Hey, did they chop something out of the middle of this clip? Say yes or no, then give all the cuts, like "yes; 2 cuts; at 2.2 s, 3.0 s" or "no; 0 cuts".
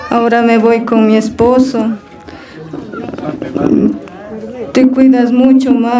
no; 0 cuts